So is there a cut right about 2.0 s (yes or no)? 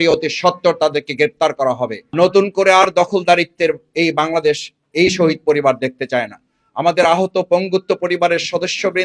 yes